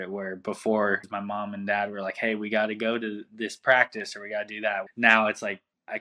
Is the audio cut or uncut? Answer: cut